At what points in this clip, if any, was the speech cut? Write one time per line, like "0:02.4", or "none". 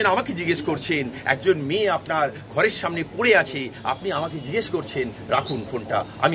none